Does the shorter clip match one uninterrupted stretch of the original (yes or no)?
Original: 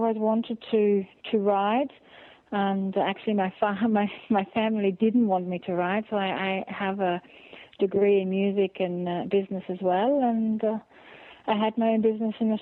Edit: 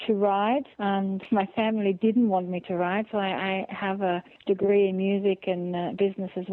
no